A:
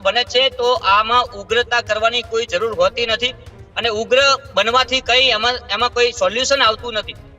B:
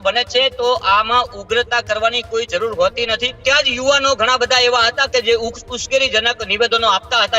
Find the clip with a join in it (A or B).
B